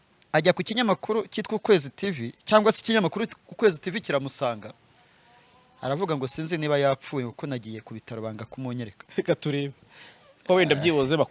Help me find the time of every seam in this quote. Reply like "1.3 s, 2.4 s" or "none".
9.0 s

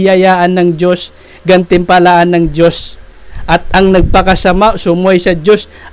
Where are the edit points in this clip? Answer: none

